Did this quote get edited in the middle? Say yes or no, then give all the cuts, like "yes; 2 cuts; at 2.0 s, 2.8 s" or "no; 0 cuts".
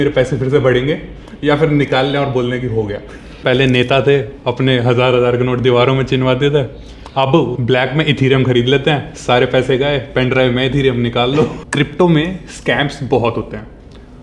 yes; 3 cuts; at 3.4 s, 7.6 s, 11.6 s